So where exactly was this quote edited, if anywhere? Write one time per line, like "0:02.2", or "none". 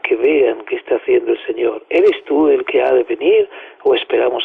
0:03.5